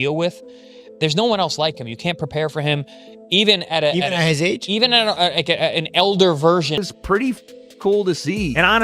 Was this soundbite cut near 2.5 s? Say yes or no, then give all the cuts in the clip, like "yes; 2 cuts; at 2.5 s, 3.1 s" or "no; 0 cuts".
no; 1 cut; at 6.8 s